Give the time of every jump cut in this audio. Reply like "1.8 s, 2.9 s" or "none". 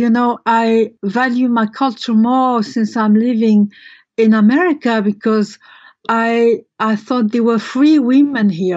0.9 s